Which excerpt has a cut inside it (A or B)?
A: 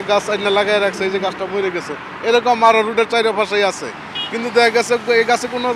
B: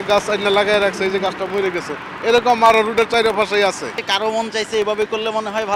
B